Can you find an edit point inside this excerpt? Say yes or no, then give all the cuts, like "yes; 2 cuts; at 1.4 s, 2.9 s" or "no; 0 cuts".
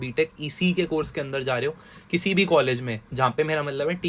no; 0 cuts